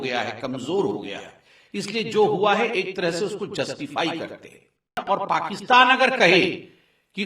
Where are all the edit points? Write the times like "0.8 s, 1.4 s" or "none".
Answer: 5.0 s